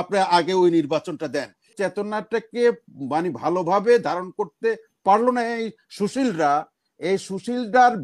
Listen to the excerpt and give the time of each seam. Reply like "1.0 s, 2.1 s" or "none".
1.7 s